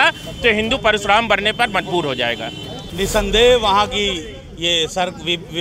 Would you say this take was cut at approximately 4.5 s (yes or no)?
no